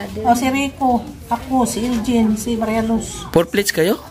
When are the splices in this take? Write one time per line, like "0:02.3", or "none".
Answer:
none